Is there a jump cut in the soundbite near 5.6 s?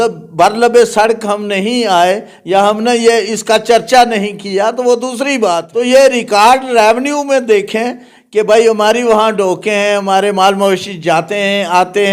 yes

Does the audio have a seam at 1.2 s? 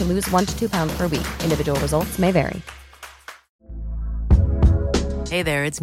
no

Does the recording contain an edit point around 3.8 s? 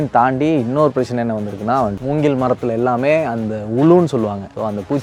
no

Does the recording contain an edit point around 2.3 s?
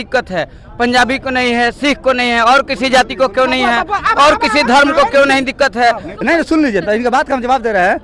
no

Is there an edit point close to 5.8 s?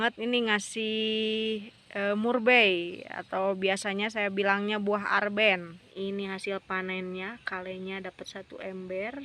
yes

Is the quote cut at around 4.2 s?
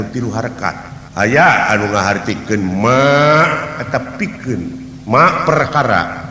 no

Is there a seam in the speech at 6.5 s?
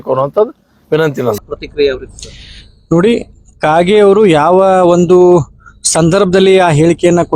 no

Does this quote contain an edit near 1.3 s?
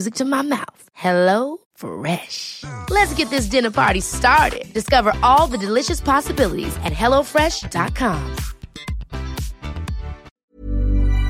no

